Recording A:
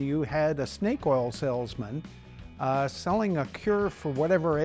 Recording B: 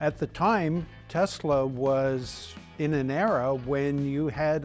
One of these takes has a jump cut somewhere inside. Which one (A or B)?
B